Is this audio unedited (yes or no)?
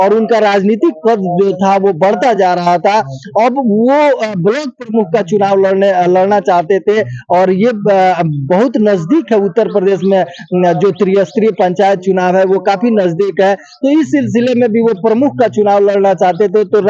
yes